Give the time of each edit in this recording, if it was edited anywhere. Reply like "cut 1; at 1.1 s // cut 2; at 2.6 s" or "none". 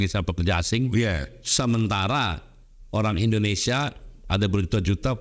none